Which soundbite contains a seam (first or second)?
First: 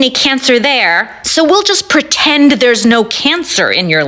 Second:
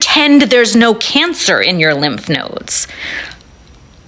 first